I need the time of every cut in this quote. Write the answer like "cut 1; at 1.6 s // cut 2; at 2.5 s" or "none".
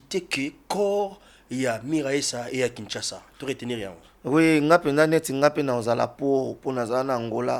none